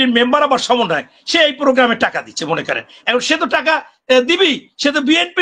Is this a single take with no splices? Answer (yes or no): yes